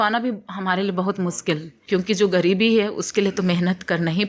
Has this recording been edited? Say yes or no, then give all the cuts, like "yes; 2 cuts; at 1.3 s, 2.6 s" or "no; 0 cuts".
yes; 1 cut; at 1.7 s